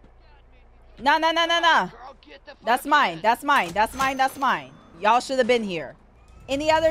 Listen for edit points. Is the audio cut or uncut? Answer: cut